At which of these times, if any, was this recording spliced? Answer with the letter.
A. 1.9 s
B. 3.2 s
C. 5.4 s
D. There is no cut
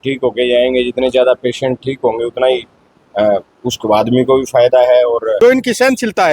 C